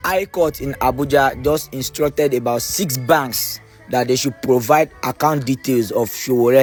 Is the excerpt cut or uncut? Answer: uncut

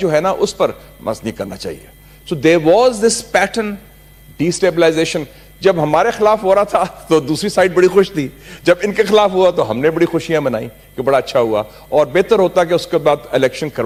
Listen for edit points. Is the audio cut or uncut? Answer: uncut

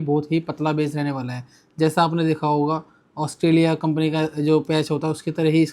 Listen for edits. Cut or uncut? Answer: uncut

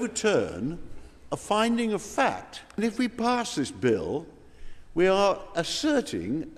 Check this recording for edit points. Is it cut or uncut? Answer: cut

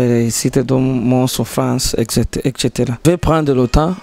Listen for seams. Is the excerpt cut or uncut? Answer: cut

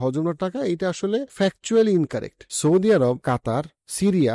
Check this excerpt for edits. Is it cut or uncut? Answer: cut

